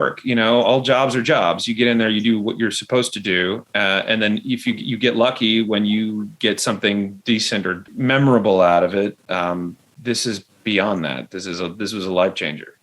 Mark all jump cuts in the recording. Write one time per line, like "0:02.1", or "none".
0:07.8